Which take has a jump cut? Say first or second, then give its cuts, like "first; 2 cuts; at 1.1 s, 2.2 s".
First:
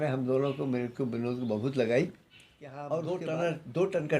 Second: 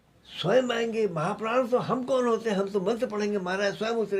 first; 1 cut; at 2.8 s